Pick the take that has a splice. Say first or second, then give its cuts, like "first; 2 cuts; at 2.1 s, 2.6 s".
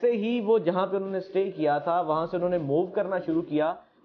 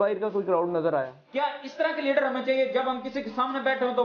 second; 1 cut; at 1.2 s